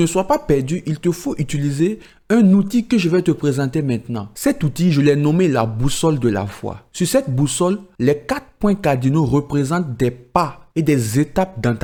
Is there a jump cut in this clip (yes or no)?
no